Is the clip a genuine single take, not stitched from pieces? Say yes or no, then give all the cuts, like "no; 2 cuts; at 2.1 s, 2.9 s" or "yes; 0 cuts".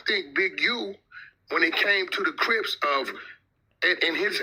yes; 0 cuts